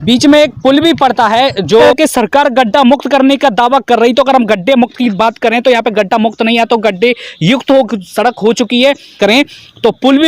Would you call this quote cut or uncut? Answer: cut